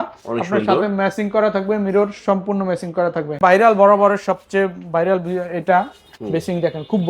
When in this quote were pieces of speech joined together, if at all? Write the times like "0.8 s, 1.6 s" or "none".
3.4 s